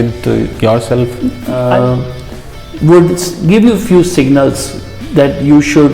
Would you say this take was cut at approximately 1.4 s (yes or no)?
yes